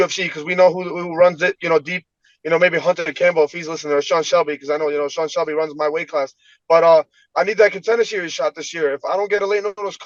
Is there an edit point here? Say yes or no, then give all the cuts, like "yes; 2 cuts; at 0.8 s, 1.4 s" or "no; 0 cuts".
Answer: no; 0 cuts